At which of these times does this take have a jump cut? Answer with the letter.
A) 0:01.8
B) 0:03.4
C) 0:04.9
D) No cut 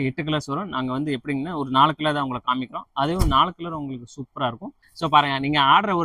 C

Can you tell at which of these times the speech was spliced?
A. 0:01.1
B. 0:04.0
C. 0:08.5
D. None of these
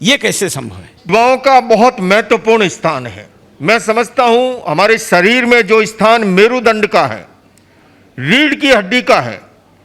A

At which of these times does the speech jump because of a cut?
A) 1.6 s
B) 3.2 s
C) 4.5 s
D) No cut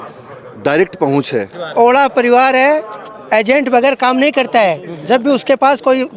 A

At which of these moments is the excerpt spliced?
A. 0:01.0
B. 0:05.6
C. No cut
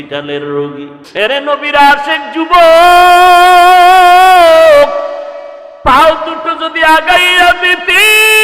A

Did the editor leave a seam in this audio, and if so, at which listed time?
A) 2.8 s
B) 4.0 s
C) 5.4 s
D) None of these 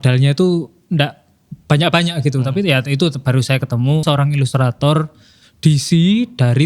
B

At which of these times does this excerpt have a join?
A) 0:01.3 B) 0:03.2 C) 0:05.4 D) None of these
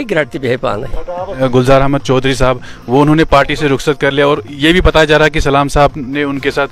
A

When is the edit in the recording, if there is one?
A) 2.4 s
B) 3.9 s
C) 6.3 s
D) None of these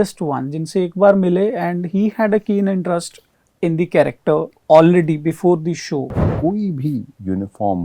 C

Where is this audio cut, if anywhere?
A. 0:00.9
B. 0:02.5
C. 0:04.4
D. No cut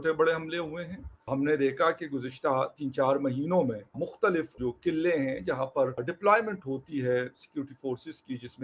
D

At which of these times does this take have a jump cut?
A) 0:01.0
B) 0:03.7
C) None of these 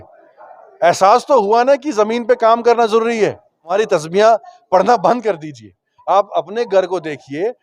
B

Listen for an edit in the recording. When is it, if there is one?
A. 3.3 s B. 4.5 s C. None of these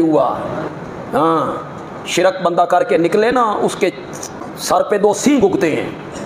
B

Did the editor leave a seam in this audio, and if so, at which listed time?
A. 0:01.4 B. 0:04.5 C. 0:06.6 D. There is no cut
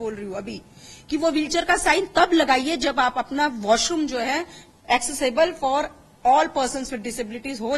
D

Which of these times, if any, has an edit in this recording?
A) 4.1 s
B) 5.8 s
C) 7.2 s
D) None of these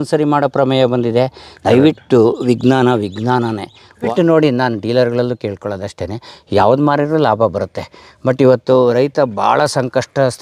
A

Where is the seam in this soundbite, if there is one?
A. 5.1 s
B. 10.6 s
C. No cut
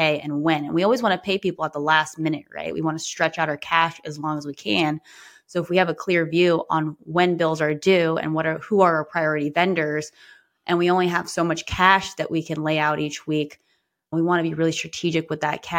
C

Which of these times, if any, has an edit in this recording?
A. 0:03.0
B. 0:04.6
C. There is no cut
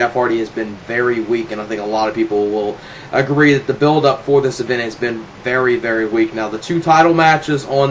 B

